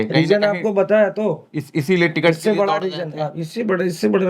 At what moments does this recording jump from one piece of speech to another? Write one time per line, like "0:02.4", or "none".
none